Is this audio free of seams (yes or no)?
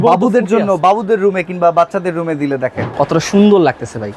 no